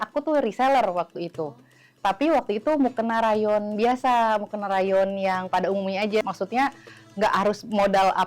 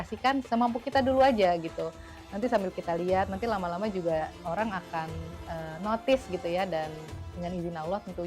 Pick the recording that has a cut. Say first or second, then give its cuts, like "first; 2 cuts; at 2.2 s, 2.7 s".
first; 1 cut; at 6.2 s